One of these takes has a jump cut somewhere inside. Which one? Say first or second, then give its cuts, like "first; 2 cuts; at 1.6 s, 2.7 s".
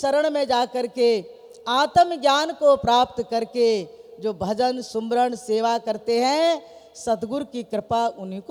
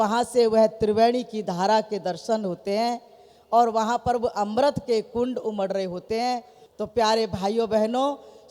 second; 1 cut; at 6.6 s